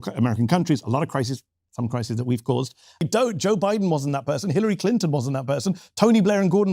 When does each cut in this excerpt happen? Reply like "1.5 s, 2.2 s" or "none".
3.0 s